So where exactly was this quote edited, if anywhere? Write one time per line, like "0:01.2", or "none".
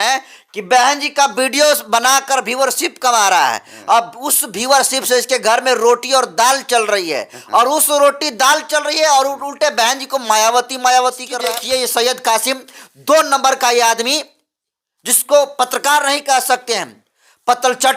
0:11.3

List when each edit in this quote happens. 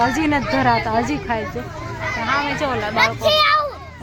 none

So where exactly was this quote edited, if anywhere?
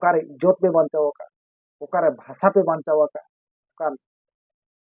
0:03.7

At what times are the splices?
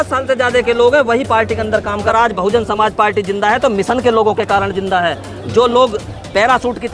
0:02.1

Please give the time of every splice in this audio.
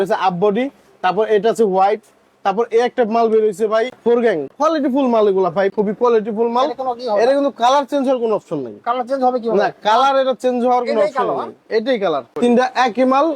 0:04.1
0:05.7
0:12.3

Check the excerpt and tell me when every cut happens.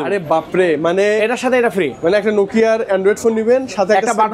none

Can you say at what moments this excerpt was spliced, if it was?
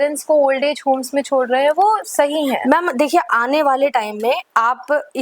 none

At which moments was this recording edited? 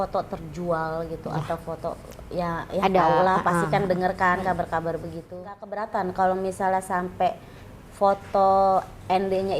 0:05.8

